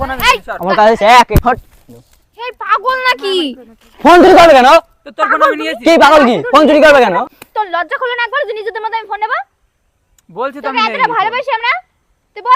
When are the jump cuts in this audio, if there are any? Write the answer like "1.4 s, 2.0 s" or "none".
1.3 s, 7.3 s